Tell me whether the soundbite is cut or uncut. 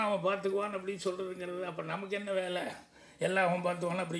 uncut